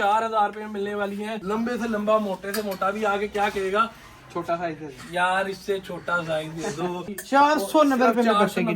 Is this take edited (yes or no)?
yes